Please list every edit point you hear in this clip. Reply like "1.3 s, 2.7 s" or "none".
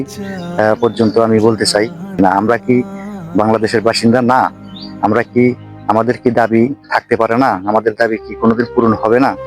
2.2 s